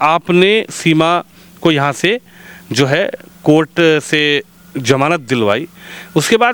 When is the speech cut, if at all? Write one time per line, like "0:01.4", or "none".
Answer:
none